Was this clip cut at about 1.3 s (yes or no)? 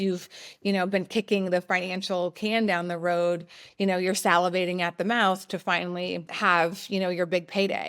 no